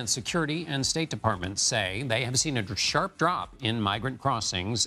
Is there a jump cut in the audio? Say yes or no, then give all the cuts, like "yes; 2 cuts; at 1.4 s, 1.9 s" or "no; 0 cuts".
no; 0 cuts